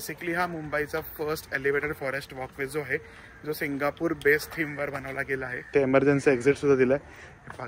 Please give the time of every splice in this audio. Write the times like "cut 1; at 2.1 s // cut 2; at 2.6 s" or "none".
cut 1; at 5.7 s